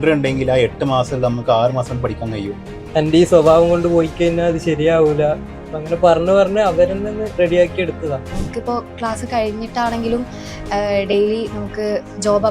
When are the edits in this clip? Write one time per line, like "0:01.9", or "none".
0:02.8
0:08.3